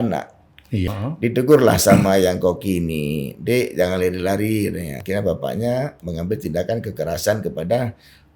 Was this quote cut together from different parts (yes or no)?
yes